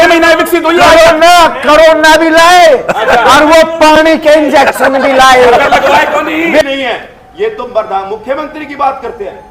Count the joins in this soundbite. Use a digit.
1